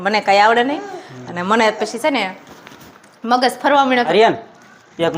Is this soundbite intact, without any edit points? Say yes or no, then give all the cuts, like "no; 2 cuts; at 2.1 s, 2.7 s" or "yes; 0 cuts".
no; 1 cut; at 4.1 s